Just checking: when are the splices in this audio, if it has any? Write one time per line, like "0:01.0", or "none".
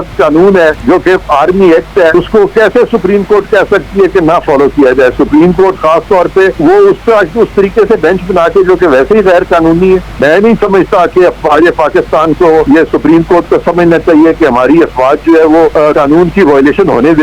0:00.8
0:02.1
0:06.5
0:10.1
0:12.6
0:15.9